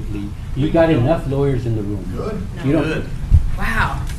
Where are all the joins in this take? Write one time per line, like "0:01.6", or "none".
0:03.1